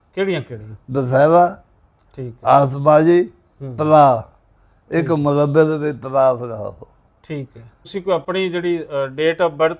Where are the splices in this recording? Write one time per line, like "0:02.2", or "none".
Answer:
0:07.8